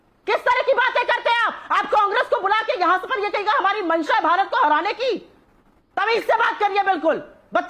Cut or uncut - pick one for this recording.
uncut